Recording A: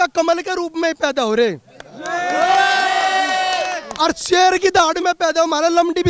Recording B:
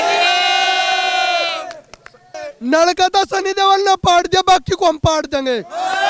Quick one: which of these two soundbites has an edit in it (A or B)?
B